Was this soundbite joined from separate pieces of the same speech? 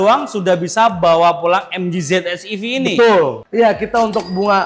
yes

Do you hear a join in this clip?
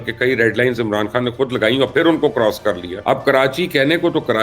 yes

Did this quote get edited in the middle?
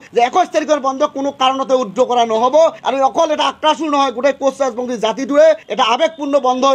no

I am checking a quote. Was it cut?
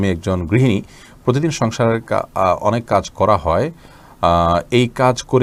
no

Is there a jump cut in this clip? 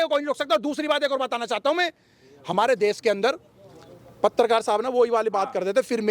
no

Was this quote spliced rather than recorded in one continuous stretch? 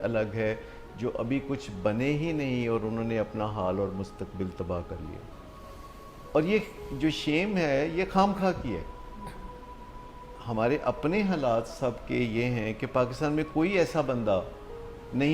yes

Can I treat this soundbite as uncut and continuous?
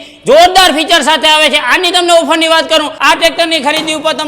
no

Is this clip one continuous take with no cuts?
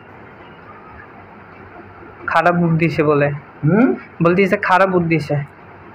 yes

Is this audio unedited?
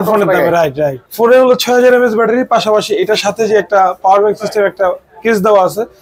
no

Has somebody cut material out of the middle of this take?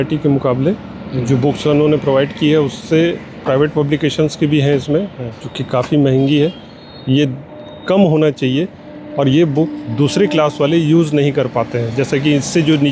no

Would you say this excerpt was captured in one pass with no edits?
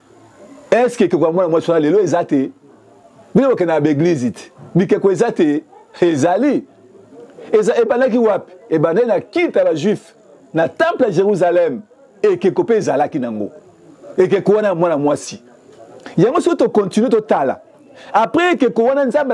yes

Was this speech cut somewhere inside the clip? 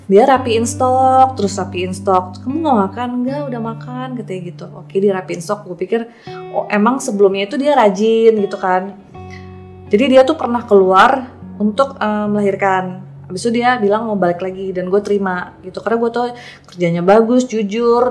no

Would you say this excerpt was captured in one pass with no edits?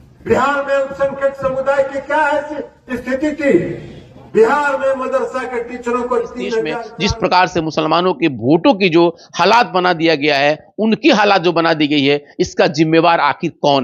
no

